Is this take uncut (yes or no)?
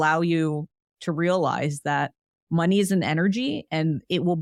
yes